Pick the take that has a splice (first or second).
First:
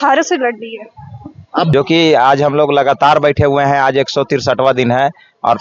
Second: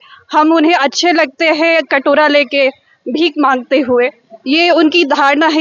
first